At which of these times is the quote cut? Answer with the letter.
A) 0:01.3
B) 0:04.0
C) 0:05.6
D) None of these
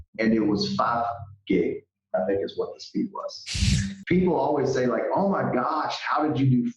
B